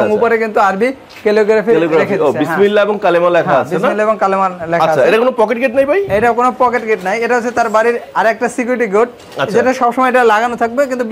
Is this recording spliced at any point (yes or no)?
no